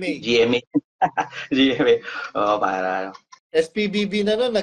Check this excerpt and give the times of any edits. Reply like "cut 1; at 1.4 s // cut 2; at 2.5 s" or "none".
cut 1; at 3.3 s